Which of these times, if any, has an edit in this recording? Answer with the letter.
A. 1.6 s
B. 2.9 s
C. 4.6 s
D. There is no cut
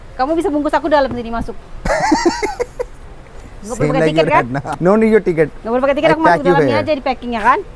C